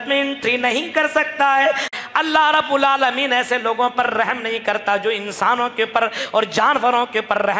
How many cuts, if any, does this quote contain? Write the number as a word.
one